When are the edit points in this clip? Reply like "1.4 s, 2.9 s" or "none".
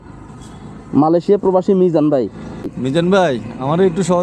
2.7 s